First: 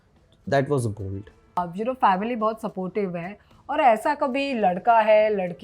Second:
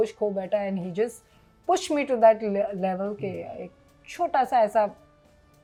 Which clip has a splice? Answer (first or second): first